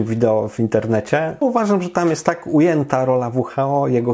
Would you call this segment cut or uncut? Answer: cut